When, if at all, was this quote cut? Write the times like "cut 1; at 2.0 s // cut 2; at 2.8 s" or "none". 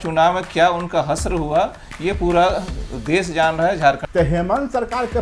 cut 1; at 4.0 s